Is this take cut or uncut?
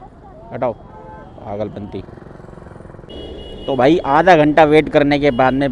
cut